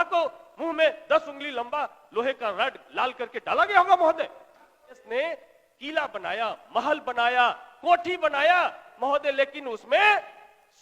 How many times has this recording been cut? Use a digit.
1